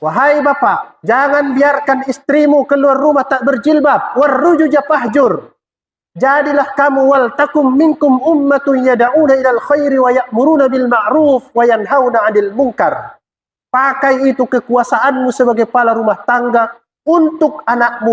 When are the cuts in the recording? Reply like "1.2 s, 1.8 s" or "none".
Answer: 0.9 s